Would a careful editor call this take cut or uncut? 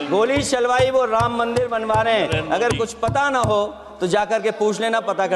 uncut